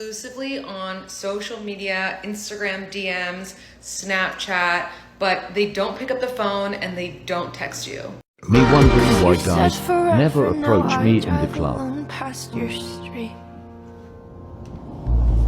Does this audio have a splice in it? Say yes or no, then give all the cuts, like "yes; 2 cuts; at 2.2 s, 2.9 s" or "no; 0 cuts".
yes; 1 cut; at 8.3 s